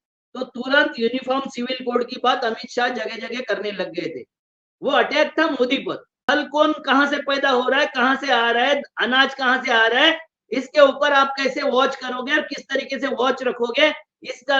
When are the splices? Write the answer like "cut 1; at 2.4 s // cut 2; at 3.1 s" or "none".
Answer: cut 1; at 6.1 s